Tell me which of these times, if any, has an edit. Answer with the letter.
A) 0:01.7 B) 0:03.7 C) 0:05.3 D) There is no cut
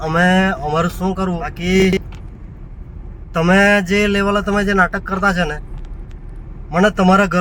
A